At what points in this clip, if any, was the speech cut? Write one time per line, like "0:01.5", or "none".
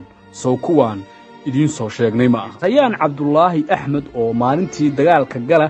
0:02.5